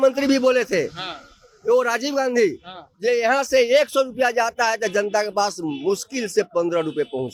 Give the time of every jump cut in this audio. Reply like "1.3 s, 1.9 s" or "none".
none